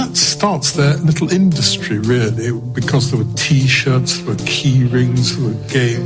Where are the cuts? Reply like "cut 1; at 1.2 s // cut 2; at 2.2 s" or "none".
none